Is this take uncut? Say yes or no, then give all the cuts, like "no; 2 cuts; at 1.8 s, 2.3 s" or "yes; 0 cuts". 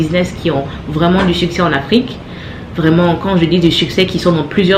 yes; 0 cuts